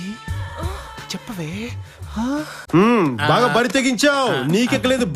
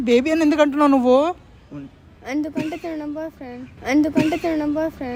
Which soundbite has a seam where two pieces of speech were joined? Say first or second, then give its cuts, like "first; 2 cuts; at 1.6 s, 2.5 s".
first; 1 cut; at 2.6 s